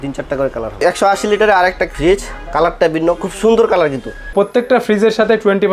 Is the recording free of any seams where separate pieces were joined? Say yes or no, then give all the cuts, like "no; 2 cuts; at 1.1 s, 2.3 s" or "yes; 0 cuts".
no; 3 cuts; at 0.8 s, 1.9 s, 4.2 s